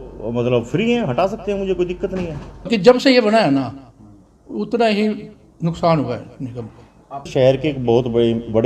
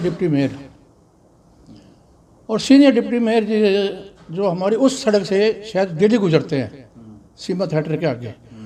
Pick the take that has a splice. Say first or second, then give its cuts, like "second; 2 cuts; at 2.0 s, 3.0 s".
first; 2 cuts; at 2.7 s, 7.3 s